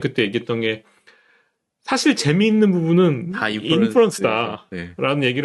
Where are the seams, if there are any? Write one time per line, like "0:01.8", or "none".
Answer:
none